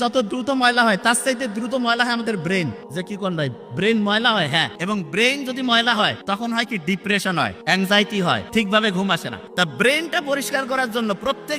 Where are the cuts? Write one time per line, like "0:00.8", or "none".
0:02.8
0:04.7
0:06.2
0:07.6
0:08.4
0:09.4